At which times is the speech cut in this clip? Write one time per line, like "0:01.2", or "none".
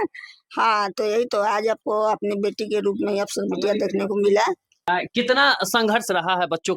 0:04.9